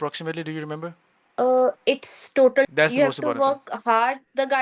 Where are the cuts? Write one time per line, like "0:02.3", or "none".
0:02.7

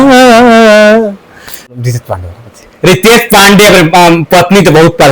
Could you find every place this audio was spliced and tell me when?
0:01.7

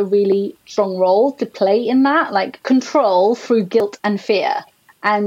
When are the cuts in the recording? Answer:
0:02.5
0:03.8

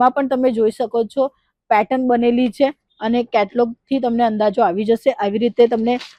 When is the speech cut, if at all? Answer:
none

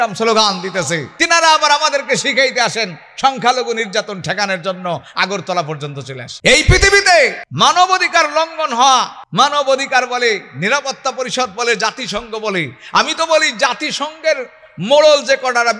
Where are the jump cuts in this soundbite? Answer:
0:01.1
0:06.2
0:07.4
0:09.2

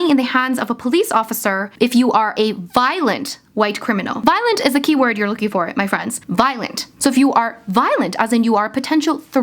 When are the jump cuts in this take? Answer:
0:01.7
0:04.1
0:06.1
0:06.9

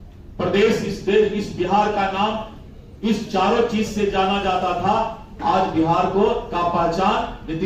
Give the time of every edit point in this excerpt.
none

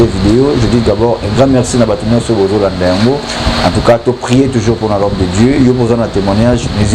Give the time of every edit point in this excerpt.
none

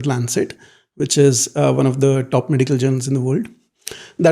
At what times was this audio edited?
none

